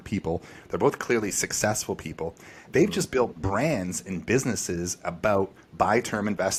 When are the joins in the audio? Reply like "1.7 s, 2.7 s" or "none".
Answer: none